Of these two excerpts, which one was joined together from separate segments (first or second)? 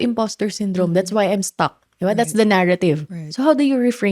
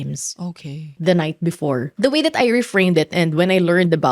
second